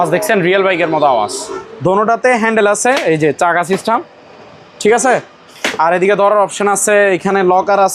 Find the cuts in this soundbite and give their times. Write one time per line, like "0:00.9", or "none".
0:01.6